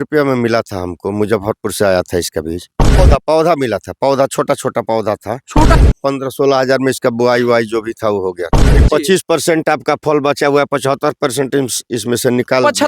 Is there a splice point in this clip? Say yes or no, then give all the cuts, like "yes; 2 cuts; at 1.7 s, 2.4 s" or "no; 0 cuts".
yes; 3 cuts; at 2.9 s, 5.7 s, 8.7 s